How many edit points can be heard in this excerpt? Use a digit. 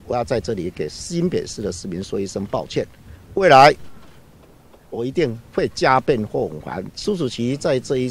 1